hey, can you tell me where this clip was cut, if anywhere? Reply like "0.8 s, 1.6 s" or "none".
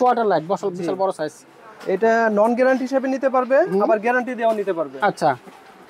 none